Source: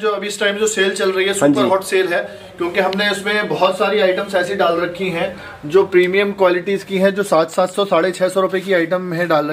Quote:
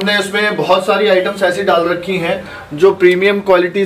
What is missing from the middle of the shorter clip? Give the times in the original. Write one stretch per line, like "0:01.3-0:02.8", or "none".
none